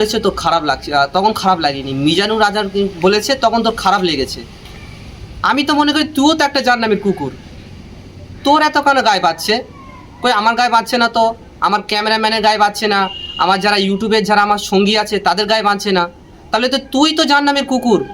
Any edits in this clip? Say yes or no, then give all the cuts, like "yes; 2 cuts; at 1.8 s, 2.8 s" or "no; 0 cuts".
no; 0 cuts